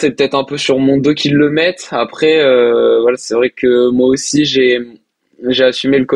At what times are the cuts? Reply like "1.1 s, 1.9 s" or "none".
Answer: none

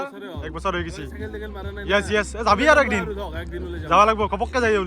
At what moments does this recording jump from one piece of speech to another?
none

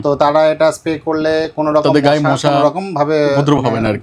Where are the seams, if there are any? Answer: none

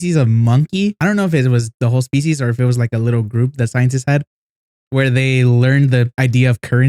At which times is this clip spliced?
1.0 s, 1.7 s, 6.1 s

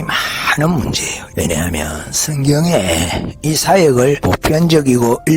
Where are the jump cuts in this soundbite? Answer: 1.2 s, 4.2 s

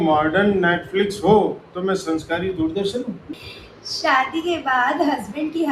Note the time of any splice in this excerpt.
3.3 s

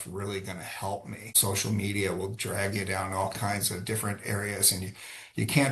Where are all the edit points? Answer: 1.3 s

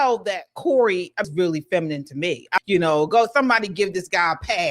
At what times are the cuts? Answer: 1.3 s, 2.6 s

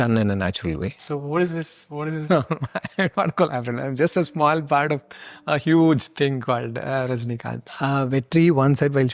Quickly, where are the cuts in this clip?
0.9 s, 7.6 s

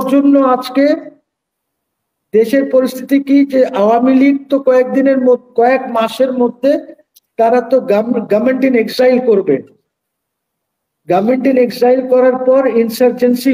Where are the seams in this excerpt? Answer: none

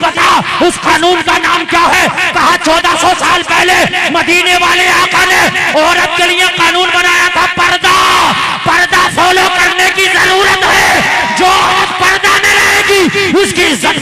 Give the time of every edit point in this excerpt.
none

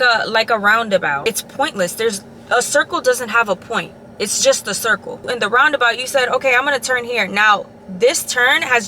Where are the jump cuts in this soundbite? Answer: 1.2 s, 5.1 s

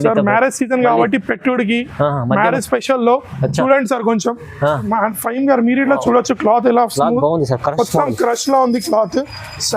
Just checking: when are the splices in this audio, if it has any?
4.8 s

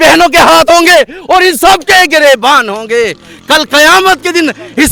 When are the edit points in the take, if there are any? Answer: none

